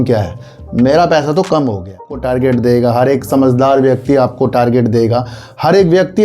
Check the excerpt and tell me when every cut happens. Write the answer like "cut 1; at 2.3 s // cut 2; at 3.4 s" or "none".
cut 1; at 2.2 s